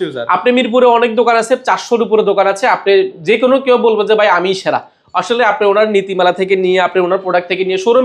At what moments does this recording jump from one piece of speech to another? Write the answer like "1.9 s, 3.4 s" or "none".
none